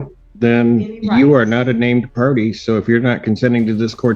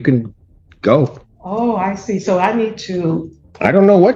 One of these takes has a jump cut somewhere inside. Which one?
second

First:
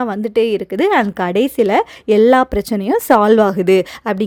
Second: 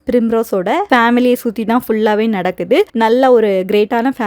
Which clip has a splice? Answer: second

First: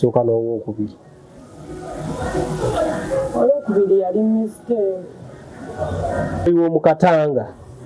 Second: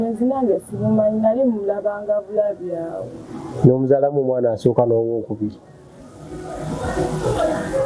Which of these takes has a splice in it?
first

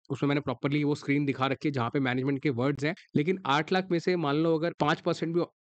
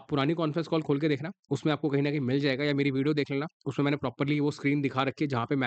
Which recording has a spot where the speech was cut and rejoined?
first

